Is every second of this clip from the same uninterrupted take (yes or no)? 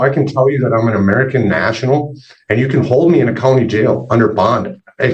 yes